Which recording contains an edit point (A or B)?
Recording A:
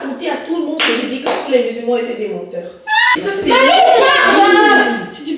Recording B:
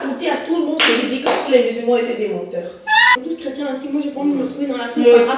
A